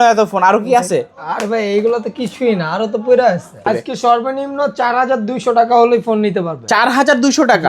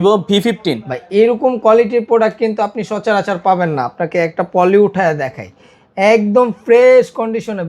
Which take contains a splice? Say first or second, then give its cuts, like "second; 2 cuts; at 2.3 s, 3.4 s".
first; 1 cut; at 3.7 s